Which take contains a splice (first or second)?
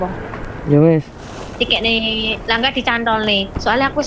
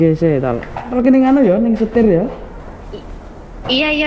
second